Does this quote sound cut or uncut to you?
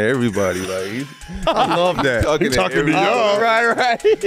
uncut